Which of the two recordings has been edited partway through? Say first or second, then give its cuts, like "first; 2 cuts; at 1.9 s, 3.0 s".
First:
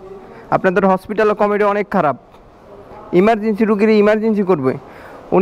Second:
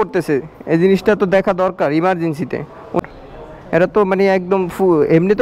second; 1 cut; at 3.0 s